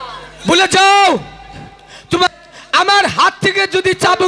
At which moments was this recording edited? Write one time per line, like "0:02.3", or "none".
0:02.3